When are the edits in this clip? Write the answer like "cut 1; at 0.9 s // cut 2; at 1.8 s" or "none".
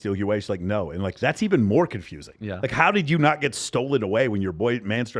none